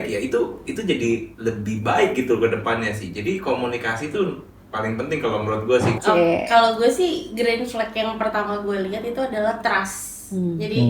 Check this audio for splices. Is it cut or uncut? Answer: cut